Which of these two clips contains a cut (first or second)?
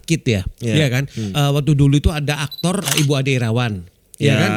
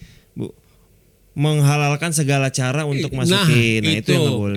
first